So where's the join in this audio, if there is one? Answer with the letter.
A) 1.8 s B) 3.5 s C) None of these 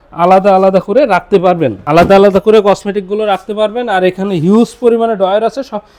C